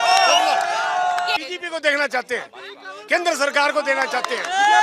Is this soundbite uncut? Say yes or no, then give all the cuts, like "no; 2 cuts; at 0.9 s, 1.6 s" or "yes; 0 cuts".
no; 1 cut; at 1.4 s